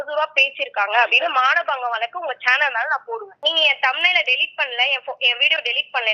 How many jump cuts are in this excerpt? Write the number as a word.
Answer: one